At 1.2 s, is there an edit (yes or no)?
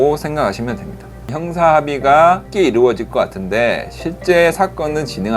yes